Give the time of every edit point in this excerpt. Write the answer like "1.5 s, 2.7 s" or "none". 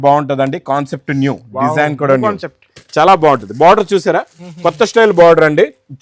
none